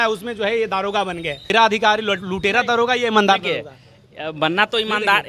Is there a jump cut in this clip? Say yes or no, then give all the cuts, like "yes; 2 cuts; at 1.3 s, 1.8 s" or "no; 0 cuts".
yes; 1 cut; at 1.5 s